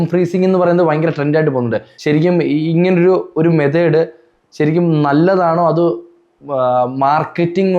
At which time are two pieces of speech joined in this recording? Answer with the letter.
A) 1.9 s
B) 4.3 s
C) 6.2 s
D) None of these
A